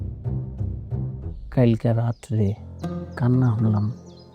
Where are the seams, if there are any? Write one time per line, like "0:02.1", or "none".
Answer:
0:01.2

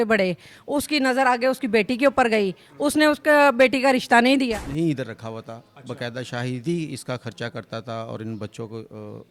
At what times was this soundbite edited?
0:04.5

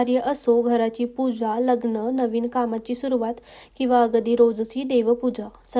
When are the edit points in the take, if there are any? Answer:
none

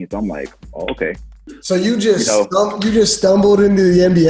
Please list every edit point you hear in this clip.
0:01.5

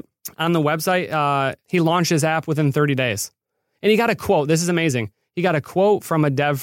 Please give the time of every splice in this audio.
0:01.6

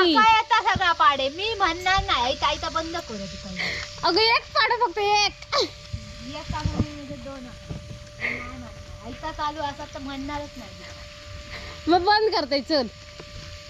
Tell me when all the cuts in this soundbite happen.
none

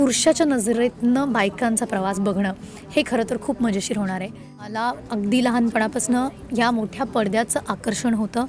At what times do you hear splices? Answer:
0:04.7

